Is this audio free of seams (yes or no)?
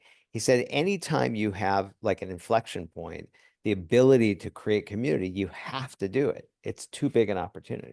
yes